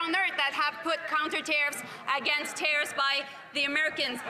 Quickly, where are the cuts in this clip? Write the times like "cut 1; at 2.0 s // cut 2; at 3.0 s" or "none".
none